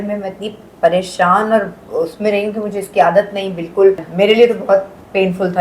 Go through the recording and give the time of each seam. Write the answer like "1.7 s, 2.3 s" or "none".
4.1 s